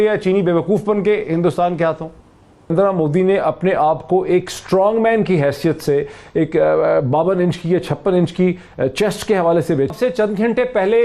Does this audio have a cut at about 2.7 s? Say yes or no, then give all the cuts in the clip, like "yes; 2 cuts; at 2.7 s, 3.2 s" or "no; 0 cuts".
yes; 2 cuts; at 2.7 s, 9.9 s